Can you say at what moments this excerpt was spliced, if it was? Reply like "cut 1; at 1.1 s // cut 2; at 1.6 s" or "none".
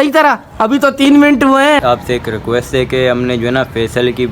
cut 1; at 1.8 s